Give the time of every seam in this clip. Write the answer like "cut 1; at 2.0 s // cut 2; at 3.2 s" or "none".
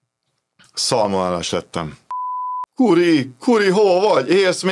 cut 1; at 2.5 s